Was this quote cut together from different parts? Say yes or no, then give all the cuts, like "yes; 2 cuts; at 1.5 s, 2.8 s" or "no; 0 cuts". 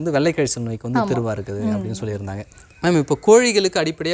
no; 0 cuts